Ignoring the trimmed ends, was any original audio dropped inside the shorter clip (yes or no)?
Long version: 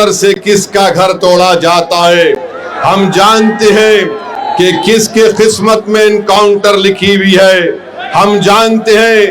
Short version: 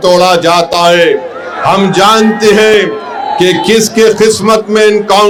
no